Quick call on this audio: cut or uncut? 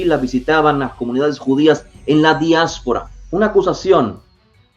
cut